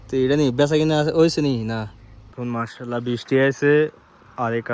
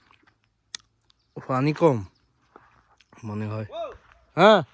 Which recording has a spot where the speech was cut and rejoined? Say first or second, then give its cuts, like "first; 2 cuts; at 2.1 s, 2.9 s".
first; 1 cut; at 2.3 s